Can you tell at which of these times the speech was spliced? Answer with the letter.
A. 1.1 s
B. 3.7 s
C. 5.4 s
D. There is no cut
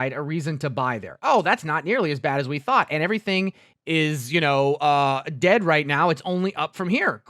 B